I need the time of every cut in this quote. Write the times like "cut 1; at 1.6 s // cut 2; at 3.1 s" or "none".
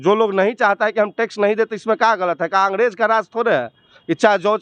none

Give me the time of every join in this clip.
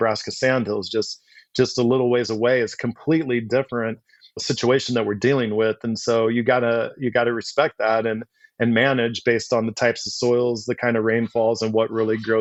none

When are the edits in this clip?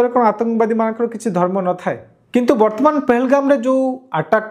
cut 1; at 2.1 s

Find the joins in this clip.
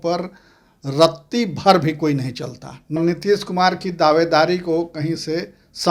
cut 1; at 3.0 s

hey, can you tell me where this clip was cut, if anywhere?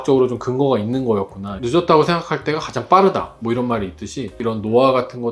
cut 1; at 1.6 s // cut 2; at 4.4 s

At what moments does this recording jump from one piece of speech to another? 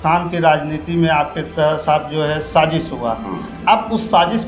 none

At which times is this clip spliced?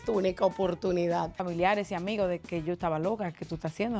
cut 1; at 1.4 s

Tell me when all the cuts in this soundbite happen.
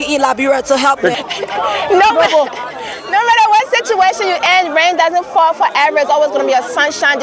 cut 1; at 1.1 s

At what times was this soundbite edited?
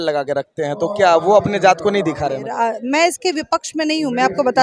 cut 1; at 2.4 s

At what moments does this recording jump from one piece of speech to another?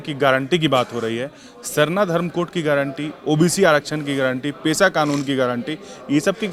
none

